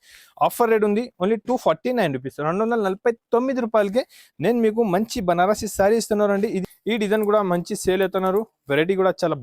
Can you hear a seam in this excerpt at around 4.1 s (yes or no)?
no